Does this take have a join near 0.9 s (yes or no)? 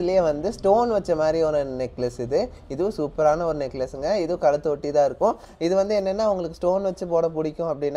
no